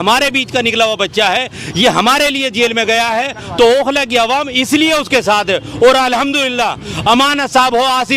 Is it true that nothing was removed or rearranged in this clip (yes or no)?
yes